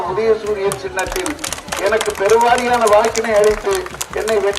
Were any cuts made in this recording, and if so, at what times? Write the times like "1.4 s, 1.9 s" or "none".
none